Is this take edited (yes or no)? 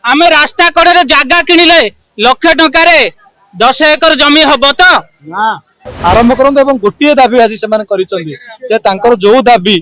yes